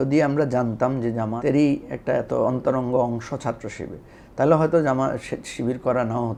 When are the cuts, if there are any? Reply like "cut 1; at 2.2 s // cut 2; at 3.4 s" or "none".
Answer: none